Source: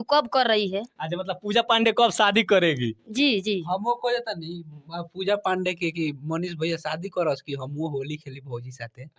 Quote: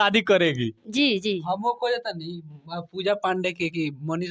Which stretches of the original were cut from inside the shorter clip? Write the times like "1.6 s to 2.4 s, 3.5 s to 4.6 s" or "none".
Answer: none